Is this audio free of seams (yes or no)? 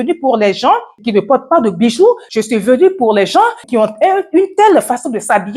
no